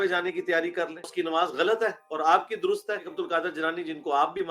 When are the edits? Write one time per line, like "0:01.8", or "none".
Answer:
0:01.1
0:03.1